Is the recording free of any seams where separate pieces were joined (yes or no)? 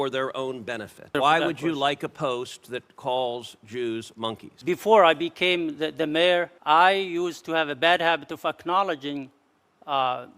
no